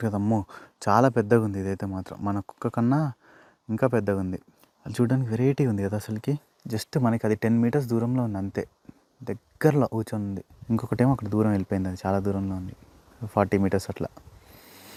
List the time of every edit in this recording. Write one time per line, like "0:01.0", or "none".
none